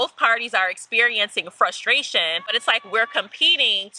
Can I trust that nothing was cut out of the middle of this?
no; 1 cut; at 2.6 s

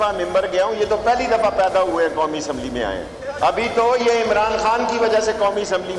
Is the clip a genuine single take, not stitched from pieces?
yes; 0 cuts

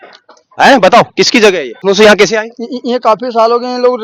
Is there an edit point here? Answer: yes; 1 cut; at 1.7 s

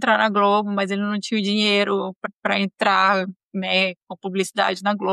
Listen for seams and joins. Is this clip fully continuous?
no; 1 cut; at 2.2 s

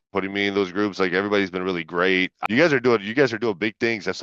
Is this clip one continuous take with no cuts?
no; 1 cut; at 2.4 s

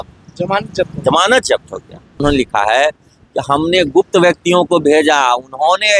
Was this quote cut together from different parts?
yes; 1 cut; at 2.2 s

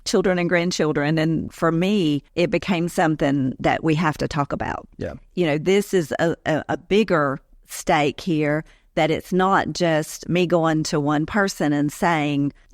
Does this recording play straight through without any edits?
no; 2 cuts; at 1.5 s, 5.3 s

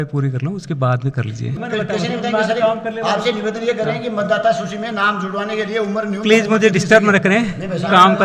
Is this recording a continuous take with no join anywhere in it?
yes; 0 cuts

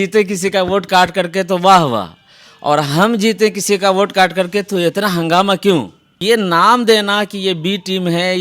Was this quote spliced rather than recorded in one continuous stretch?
yes; 1 cut; at 6.2 s

